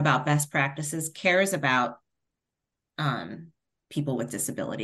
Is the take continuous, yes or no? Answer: yes